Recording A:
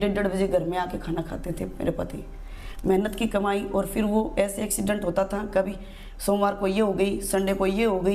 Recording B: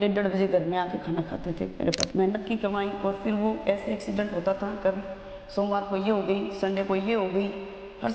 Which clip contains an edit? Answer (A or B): B